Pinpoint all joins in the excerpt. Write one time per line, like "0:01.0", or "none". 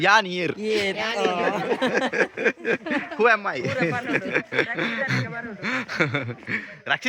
none